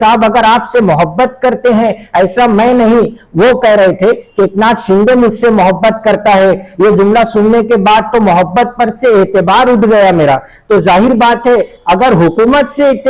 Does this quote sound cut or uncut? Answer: uncut